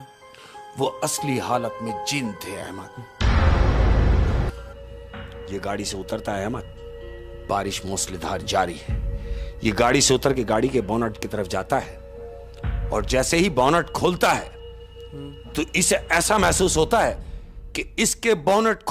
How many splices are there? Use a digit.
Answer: 1